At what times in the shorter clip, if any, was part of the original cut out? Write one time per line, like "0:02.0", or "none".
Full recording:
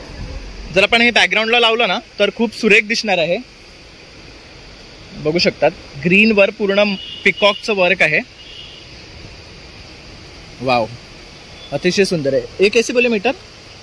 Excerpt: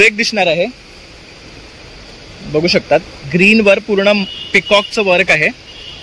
none